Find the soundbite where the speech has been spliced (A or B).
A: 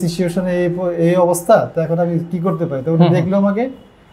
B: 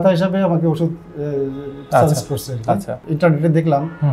B